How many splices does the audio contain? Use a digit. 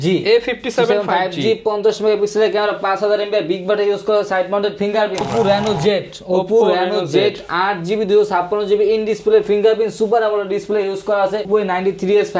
2